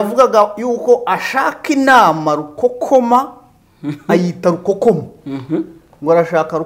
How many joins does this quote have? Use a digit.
0